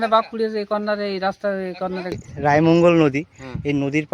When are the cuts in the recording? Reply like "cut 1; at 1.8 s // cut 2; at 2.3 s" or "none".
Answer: cut 1; at 2.2 s